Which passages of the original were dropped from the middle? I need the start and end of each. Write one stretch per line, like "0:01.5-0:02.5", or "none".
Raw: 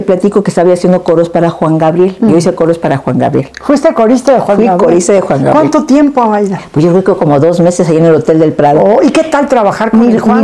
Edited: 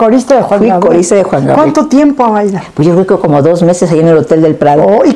none